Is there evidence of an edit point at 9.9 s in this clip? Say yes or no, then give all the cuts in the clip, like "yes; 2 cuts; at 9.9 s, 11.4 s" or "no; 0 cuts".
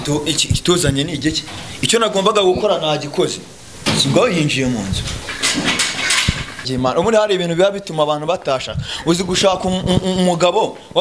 no; 1 cut; at 6.7 s